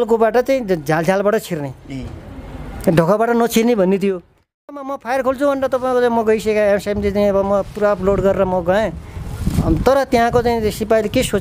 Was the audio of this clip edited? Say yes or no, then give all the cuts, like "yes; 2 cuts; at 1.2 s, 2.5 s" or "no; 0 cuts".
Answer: yes; 1 cut; at 4.7 s